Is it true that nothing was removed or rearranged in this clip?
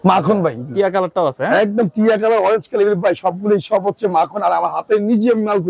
yes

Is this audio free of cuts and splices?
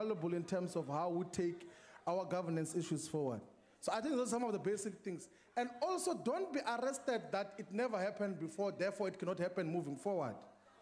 yes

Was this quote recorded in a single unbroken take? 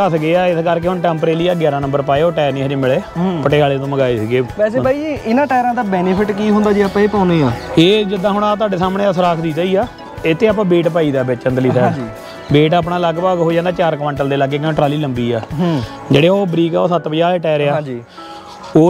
yes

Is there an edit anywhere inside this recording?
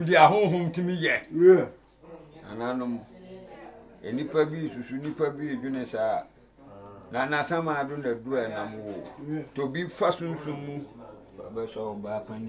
no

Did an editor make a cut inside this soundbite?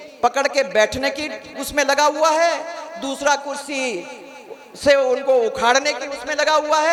no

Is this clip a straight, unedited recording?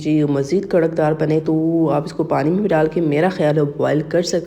yes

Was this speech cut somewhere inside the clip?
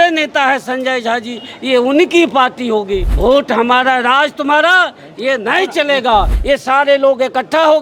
yes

